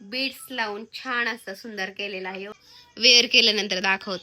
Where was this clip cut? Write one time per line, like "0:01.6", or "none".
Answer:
0:02.7